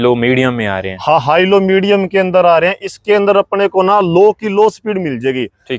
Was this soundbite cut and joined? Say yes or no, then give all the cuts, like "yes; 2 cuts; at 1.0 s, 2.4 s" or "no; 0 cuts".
no; 0 cuts